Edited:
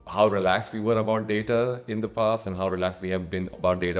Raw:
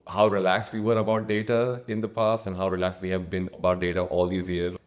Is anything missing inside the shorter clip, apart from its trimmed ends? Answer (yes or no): no